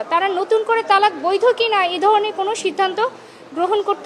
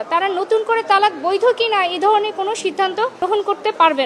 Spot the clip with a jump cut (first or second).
second